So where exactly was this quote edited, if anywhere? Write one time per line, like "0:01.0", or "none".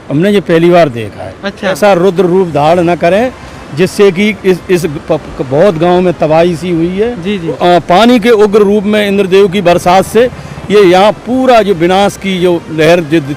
0:01.8
0:07.6